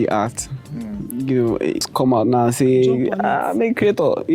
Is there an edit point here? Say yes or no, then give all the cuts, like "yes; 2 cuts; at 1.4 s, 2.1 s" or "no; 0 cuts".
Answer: yes; 1 cut; at 1.8 s